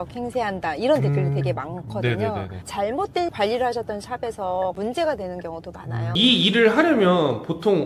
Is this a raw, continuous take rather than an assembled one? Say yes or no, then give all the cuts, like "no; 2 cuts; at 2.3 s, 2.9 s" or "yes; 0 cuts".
no; 1 cut; at 6.1 s